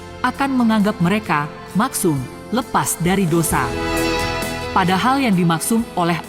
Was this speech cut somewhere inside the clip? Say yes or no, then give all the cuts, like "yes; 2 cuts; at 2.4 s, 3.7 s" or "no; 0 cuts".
no; 0 cuts